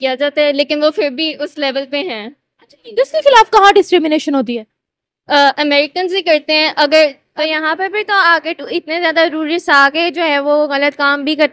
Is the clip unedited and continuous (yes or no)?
no